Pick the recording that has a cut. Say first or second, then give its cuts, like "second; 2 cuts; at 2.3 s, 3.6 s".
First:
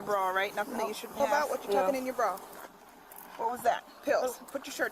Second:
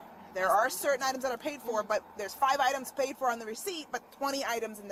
first; 1 cut; at 1.2 s